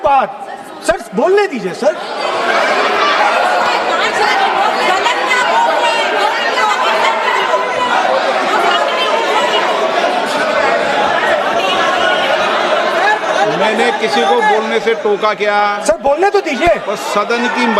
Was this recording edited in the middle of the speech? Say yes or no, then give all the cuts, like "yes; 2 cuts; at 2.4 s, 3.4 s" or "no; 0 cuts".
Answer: no; 0 cuts